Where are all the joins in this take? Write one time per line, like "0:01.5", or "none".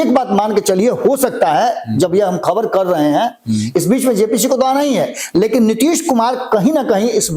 none